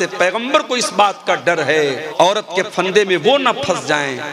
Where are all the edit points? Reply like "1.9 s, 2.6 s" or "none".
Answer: 2.0 s

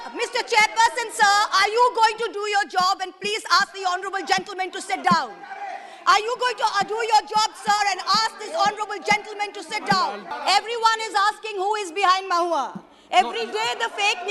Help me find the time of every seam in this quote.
10.3 s

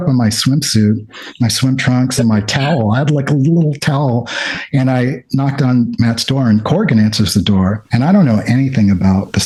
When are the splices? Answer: none

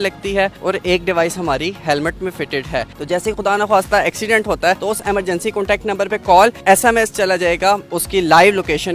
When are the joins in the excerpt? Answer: 2.9 s, 4.8 s, 6.6 s, 7.9 s

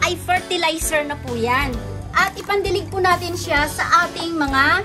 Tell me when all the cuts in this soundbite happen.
2.0 s

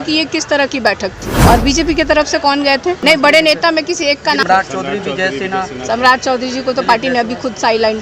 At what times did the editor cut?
1.3 s, 3.0 s, 4.4 s

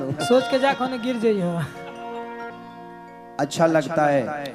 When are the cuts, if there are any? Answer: 2.5 s

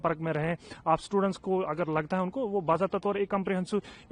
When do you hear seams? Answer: none

